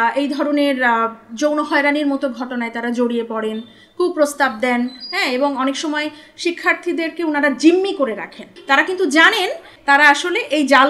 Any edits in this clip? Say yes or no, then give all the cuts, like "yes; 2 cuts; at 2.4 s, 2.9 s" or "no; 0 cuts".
yes; 2 cuts; at 8.5 s, 9.7 s